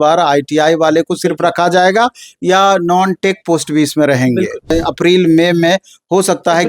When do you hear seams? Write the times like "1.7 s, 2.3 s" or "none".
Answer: 4.7 s